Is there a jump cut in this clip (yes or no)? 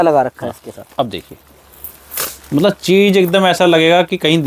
no